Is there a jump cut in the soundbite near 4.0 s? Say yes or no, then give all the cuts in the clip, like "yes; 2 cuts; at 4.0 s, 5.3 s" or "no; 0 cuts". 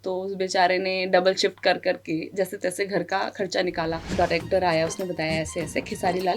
yes; 1 cut; at 4.0 s